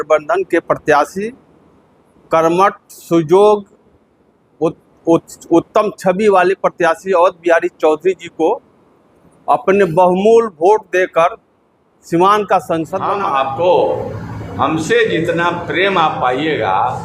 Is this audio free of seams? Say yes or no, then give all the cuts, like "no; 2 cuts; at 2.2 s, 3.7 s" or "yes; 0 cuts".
no; 1 cut; at 13.0 s